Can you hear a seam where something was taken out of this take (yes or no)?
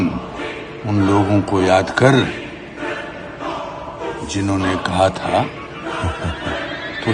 no